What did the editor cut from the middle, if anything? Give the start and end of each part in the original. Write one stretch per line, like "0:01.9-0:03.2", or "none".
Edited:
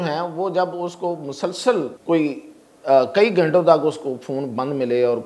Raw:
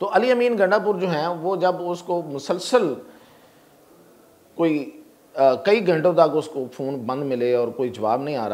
0:03.0-0:04.5